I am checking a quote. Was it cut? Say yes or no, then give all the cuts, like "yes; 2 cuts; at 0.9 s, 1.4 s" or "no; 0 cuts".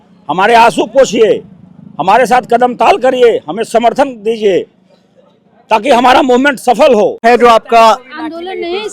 yes; 1 cut; at 7.2 s